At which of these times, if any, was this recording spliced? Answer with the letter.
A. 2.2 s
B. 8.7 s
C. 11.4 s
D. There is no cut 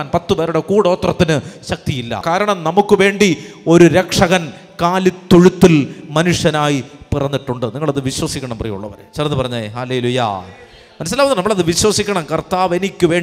A